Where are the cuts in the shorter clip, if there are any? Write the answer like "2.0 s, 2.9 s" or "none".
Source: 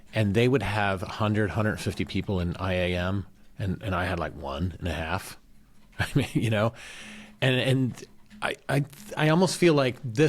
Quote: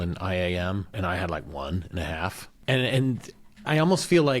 0.9 s, 2.5 s, 3.5 s